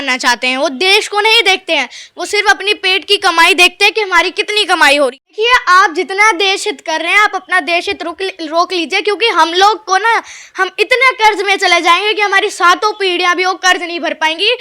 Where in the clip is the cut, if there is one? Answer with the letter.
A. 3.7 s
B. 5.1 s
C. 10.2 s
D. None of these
B